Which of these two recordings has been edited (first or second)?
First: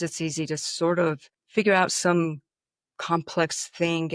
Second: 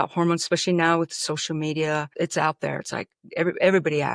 second